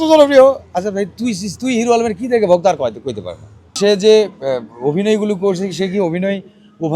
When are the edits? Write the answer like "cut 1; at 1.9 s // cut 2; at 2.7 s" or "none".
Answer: cut 1; at 3.8 s